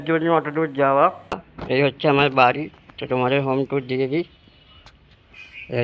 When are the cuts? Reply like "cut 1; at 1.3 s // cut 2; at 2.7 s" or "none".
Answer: cut 1; at 1.5 s